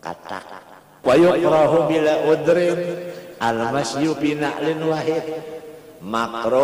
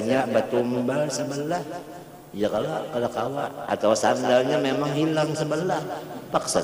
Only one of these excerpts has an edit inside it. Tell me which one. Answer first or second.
first